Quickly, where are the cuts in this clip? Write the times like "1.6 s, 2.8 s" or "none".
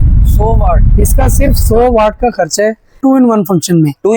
3.0 s